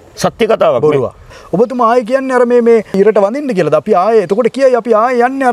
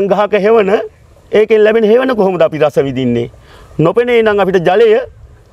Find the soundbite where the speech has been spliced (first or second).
first